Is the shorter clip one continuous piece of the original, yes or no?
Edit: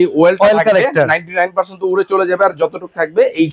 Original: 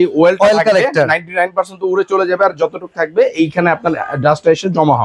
yes